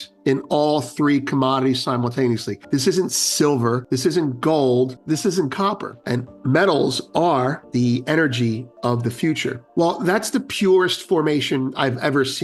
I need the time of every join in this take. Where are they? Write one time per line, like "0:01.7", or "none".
0:02.5
0:03.8
0:05.0
0:05.9
0:07.6
0:09.7